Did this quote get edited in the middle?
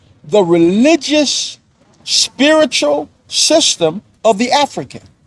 no; 0 cuts

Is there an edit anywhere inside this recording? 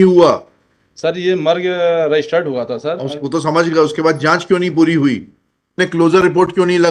yes; 1 cut; at 5.7 s

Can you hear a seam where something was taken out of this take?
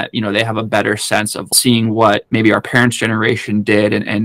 yes; 2 cuts; at 1.5 s, 2.2 s

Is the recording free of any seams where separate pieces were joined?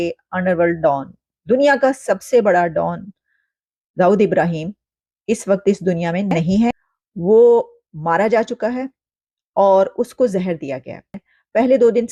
yes; 0 cuts

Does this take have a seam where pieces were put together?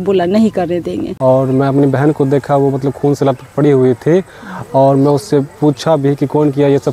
yes; 1 cut; at 1.1 s

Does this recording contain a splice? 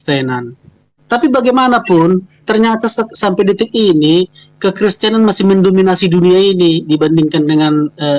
yes; 1 cut; at 0.9 s

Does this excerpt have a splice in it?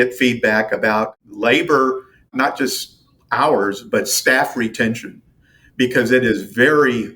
yes; 2 cuts; at 1.2 s, 2.3 s

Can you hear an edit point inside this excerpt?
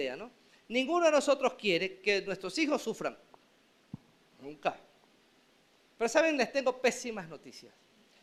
no; 0 cuts

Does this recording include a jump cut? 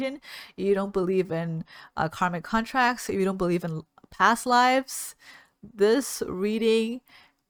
no; 0 cuts

